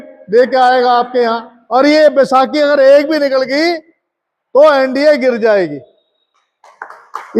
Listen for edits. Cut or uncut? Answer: cut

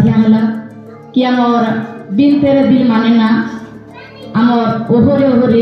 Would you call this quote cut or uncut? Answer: uncut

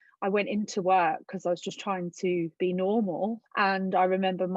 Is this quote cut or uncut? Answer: cut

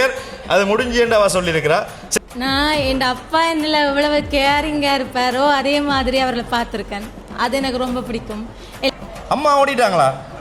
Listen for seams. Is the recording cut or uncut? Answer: cut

